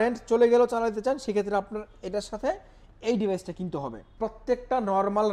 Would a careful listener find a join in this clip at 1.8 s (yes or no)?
no